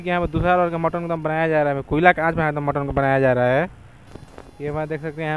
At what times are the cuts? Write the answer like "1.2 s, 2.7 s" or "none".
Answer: none